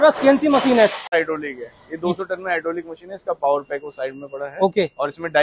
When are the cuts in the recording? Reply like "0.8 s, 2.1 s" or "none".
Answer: 1.0 s